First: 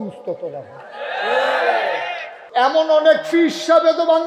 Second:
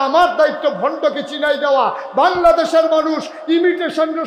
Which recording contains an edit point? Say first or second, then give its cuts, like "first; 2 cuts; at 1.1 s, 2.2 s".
first; 1 cut; at 2.4 s